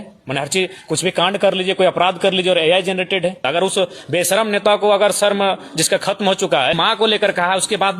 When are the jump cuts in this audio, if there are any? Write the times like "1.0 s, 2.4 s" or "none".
3.4 s, 6.8 s